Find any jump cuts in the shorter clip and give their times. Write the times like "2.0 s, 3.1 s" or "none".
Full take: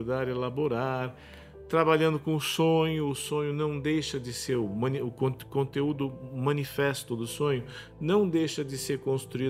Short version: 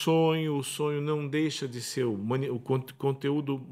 none